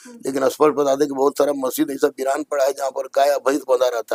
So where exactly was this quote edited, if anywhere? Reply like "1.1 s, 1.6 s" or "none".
none